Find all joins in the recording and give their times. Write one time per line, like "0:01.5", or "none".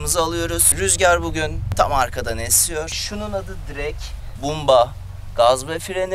0:01.6
0:03.0
0:04.3